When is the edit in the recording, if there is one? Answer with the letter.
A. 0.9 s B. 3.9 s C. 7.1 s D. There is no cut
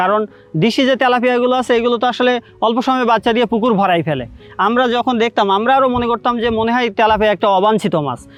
D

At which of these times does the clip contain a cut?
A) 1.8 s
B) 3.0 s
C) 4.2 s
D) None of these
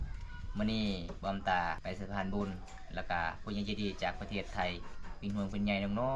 A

